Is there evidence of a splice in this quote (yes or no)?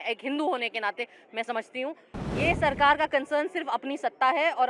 yes